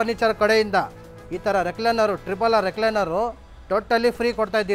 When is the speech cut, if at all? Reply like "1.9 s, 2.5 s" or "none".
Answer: none

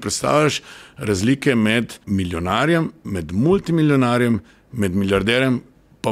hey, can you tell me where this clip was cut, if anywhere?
2.0 s

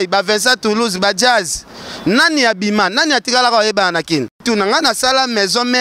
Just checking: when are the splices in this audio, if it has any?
4.4 s

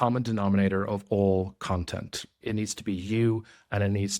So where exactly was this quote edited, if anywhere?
2.3 s

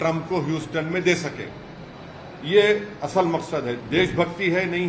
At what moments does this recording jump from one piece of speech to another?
3.8 s

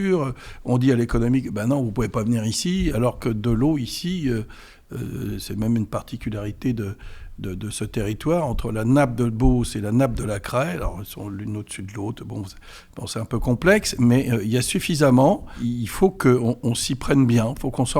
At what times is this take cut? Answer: 15.5 s

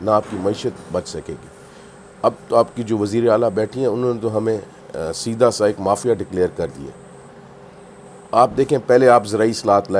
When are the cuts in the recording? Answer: none

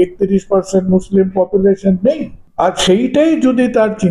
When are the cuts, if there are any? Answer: 2.4 s

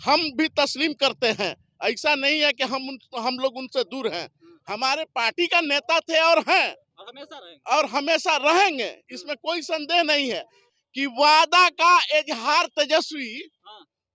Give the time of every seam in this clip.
10.6 s

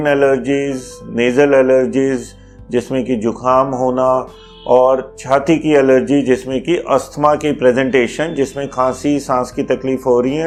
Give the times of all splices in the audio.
none

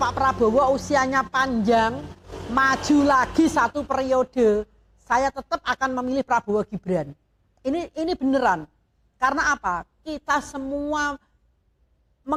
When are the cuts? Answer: none

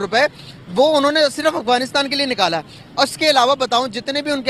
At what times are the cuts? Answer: none

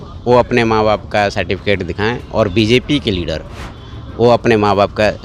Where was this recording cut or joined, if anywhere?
none

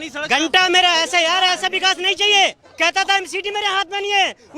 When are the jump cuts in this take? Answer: 2.6 s

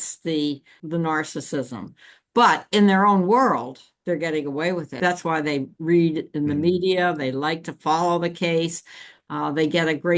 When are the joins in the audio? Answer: 0.8 s, 5.0 s

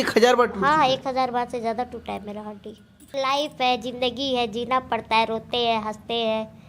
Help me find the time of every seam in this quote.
3.1 s

